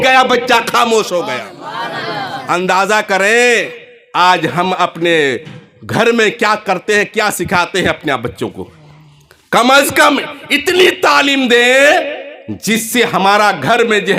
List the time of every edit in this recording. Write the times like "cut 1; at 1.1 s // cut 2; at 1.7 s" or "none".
none